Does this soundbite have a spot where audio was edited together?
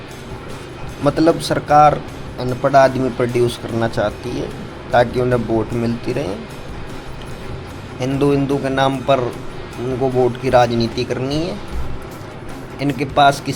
no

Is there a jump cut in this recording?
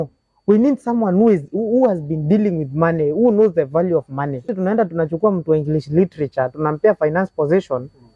yes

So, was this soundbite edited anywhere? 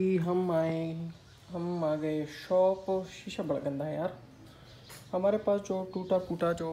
no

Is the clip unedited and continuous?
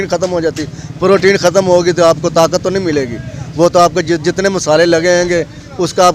yes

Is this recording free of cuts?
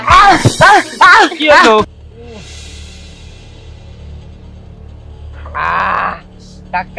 no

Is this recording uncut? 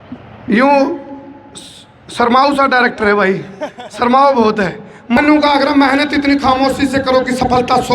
no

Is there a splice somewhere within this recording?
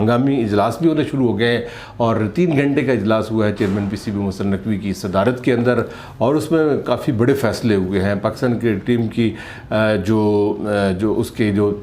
no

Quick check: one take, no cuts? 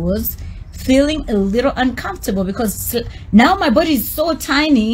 yes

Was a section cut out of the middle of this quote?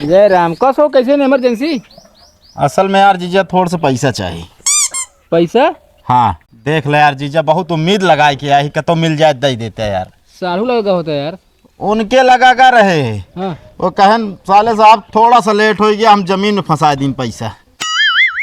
yes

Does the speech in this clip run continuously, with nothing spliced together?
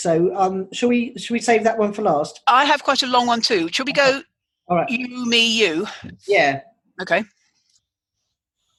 yes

